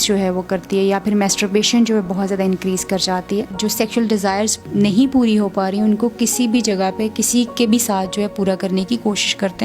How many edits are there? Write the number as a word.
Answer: two